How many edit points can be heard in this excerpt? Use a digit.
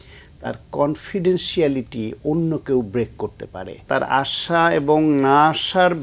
1